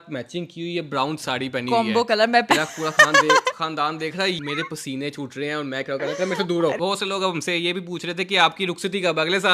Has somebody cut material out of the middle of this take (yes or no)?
yes